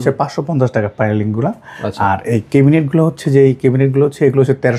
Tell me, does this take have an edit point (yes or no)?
no